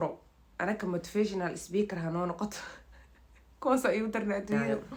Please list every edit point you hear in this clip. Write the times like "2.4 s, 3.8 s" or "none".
none